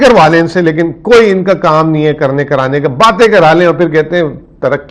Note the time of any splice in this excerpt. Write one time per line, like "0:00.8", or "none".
none